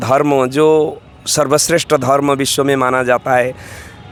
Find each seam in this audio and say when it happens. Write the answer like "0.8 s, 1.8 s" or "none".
none

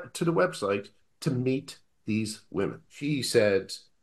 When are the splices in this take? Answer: 2.9 s

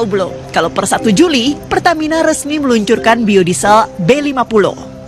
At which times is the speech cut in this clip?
none

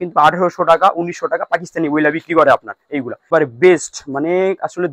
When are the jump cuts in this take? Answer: 3.2 s

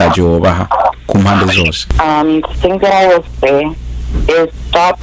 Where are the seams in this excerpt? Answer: 1.8 s

